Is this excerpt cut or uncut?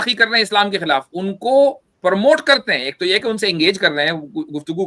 uncut